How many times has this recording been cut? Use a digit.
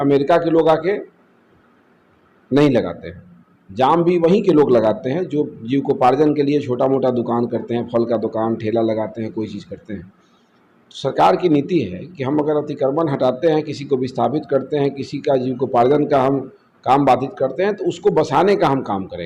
0